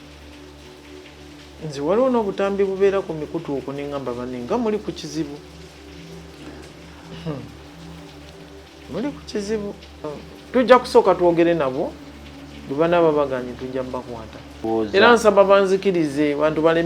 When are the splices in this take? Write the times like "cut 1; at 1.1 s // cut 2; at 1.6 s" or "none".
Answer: cut 1; at 10.1 s // cut 2; at 14.7 s